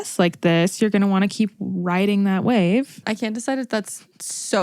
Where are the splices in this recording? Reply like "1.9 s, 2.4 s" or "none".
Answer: 3.0 s